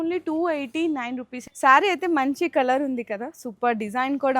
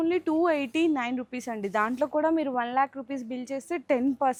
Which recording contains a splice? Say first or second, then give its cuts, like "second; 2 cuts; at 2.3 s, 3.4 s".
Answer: first; 1 cut; at 1.4 s